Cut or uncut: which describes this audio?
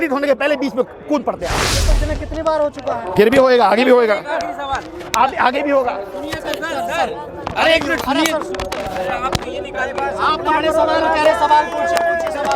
cut